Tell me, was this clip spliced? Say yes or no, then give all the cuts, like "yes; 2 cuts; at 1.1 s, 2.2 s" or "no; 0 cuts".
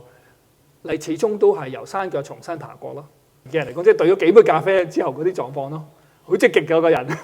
yes; 1 cut; at 3.4 s